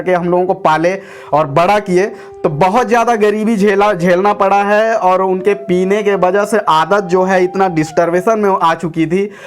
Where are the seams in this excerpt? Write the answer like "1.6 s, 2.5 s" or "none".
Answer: 2.2 s